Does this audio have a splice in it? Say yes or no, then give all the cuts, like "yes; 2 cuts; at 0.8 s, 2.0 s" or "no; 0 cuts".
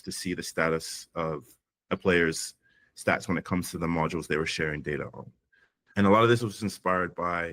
yes; 1 cut; at 5.9 s